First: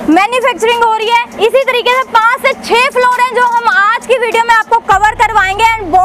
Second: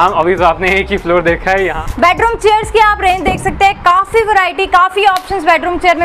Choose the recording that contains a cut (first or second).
second